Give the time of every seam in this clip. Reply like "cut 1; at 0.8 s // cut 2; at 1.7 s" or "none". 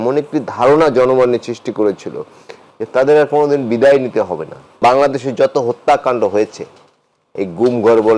cut 1; at 4.7 s